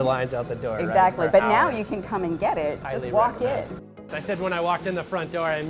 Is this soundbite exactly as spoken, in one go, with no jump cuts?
no; 2 cuts; at 2.8 s, 3.8 s

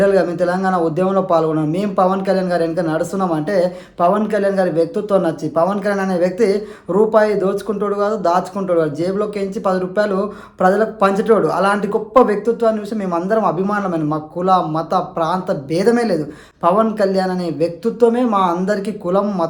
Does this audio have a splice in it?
no; 0 cuts

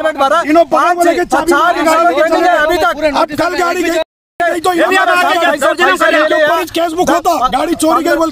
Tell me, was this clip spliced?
yes; 1 cut; at 4.0 s

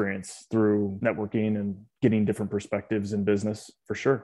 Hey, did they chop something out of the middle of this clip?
no; 0 cuts

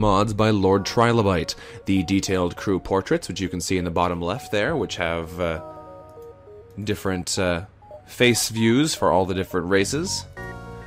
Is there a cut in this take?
no; 0 cuts

